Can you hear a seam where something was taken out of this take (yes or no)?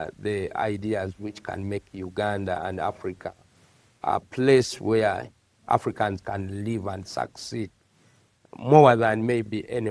no